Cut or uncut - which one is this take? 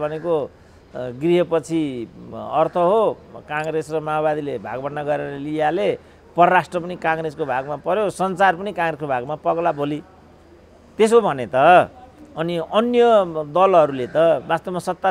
uncut